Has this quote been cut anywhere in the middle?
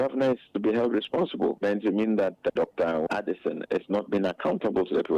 yes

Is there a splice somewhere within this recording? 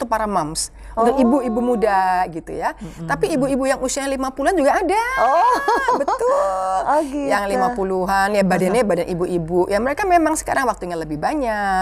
no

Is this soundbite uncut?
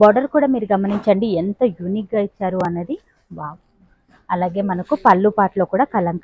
yes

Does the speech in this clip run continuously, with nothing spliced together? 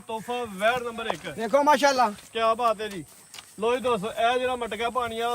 yes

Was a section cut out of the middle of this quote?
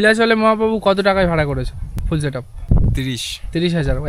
no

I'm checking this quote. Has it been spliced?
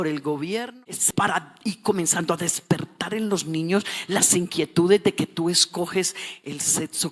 yes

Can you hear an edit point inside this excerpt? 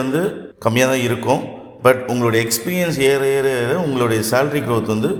no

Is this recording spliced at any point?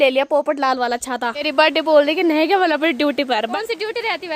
yes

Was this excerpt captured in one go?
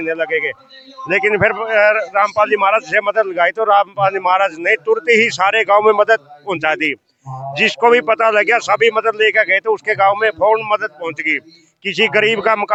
yes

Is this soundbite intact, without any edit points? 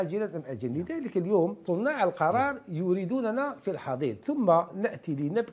no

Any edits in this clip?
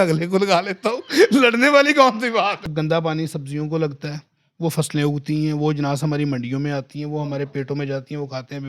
yes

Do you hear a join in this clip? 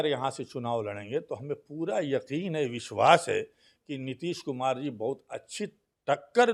no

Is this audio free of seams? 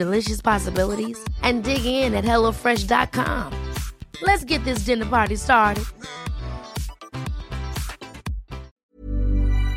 no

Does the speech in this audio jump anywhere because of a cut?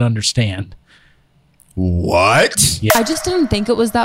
yes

